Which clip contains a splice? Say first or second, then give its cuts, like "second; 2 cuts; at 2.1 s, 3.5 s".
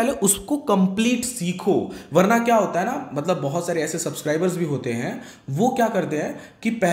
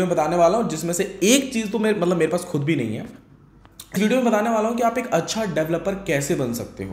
second; 1 cut; at 4.0 s